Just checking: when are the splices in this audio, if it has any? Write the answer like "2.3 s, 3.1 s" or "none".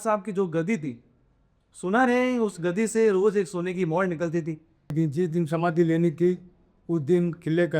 4.9 s